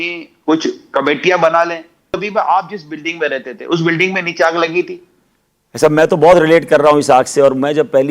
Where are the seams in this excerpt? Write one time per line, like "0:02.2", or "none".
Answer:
0:02.2